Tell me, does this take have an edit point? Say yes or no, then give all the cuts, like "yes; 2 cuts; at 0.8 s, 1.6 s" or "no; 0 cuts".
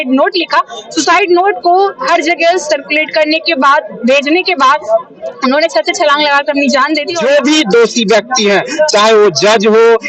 yes; 1 cut; at 7.1 s